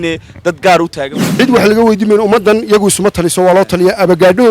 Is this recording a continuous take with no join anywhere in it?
no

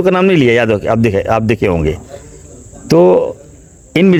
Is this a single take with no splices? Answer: yes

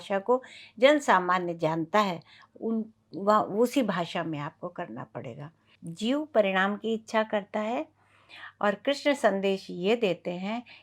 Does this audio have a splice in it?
yes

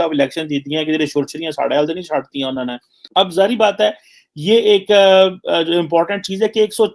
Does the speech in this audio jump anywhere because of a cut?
no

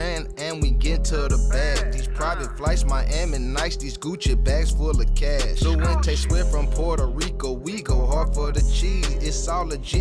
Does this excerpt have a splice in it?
no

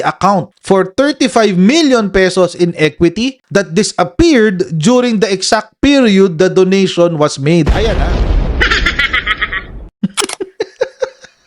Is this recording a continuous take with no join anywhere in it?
no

